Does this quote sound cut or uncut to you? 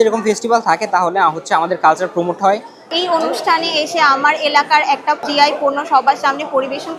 cut